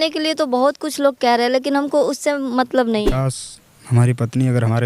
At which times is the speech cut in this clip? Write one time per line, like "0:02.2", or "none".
0:03.1